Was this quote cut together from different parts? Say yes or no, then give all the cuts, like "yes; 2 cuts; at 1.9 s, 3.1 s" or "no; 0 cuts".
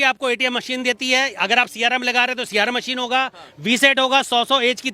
no; 0 cuts